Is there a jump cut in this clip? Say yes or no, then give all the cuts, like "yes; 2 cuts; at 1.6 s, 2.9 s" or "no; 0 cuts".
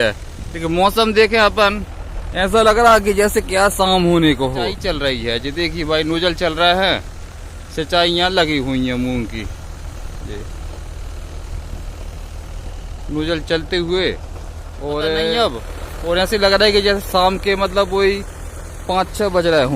yes; 2 cuts; at 4.8 s, 15.4 s